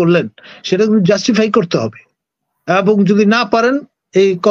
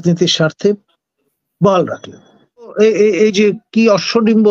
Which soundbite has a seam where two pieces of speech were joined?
second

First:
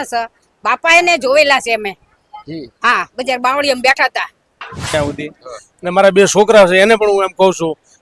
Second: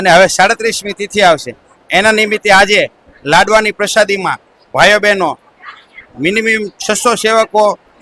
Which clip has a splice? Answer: first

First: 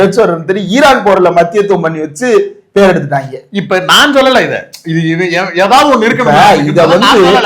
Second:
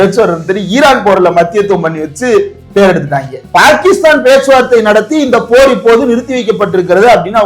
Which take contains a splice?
second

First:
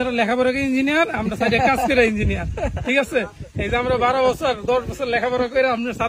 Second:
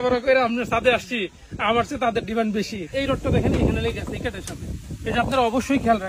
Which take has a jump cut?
second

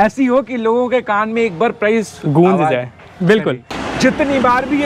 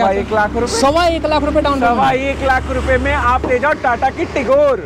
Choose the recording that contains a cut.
first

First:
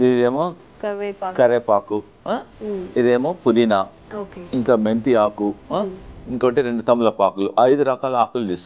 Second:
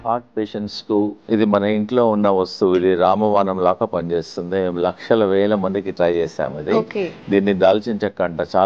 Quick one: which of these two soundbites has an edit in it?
second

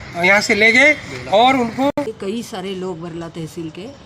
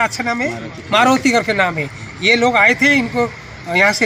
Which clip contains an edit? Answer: first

